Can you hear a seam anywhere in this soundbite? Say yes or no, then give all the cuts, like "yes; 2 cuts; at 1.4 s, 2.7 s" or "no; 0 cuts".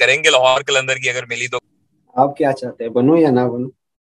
yes; 1 cut; at 1.6 s